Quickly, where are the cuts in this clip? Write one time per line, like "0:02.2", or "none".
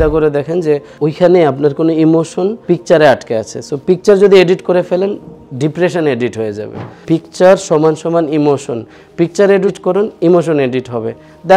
0:00.9
0:02.6
0:06.9
0:09.8